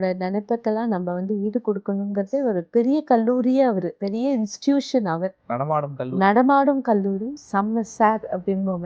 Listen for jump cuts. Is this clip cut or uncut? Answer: cut